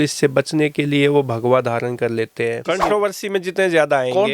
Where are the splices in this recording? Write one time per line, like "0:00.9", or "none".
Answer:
0:02.6